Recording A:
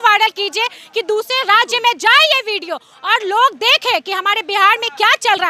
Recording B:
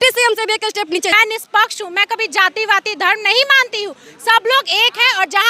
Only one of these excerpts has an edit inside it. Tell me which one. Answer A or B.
B